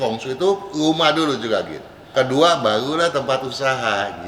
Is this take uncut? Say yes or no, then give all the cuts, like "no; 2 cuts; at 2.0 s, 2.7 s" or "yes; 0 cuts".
no; 1 cut; at 2.1 s